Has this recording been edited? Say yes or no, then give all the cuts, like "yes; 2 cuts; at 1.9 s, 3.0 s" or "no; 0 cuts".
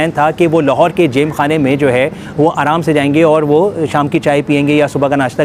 no; 0 cuts